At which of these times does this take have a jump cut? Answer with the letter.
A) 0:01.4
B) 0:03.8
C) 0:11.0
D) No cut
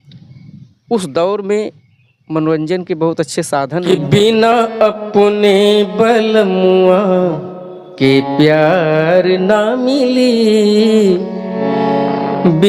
B